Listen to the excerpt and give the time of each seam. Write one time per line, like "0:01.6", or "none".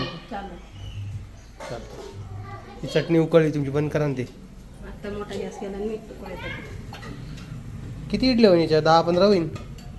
none

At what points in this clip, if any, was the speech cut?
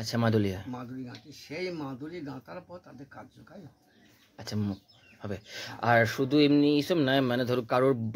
none

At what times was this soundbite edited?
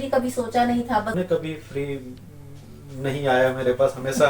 0:01.1

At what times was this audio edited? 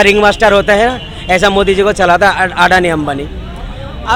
none

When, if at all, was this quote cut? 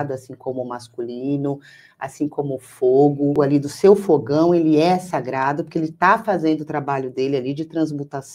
0:03.4

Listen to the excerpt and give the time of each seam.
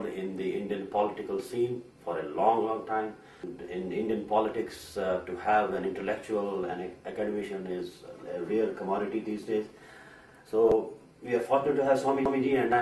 0:07.0

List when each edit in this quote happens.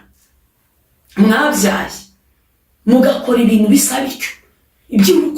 none

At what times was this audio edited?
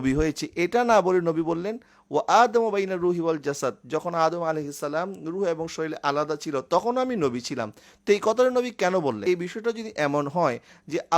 0:09.2

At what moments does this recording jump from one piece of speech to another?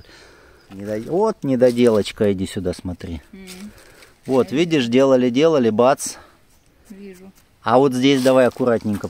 0:01.1

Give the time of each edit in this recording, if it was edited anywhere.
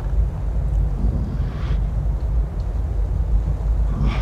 none

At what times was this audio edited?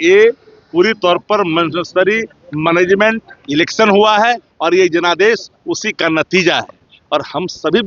none

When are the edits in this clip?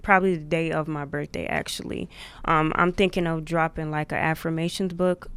none

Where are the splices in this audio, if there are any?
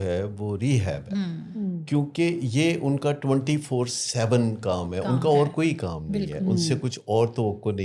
none

